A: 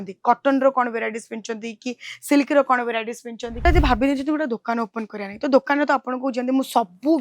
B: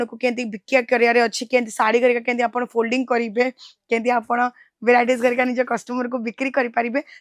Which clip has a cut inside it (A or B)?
A